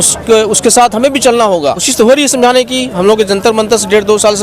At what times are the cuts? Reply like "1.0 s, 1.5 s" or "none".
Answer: 1.9 s